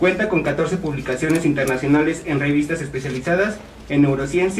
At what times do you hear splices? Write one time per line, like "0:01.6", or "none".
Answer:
0:02.1